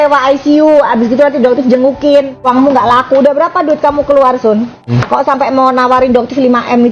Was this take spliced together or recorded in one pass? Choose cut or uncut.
cut